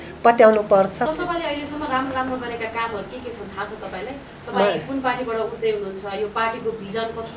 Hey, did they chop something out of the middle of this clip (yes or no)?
no